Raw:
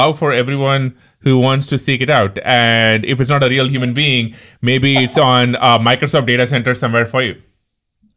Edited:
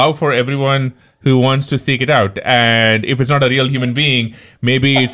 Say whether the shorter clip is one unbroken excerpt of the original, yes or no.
yes